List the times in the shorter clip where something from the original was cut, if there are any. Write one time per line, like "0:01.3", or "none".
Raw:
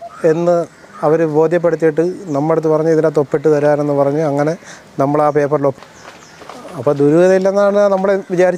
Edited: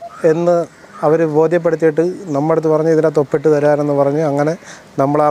none